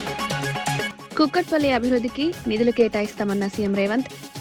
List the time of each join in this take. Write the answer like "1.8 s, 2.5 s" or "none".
1.0 s